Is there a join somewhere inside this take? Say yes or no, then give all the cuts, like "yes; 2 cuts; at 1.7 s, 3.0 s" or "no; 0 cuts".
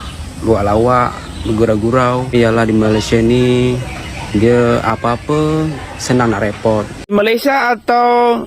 yes; 2 cuts; at 2.3 s, 7.1 s